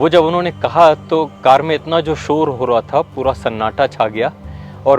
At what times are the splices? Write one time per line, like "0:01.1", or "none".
none